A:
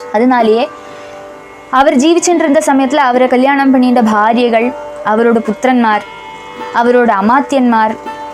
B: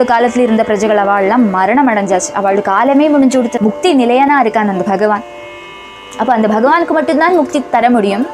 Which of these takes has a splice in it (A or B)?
B